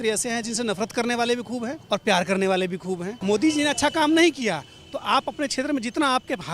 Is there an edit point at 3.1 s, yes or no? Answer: yes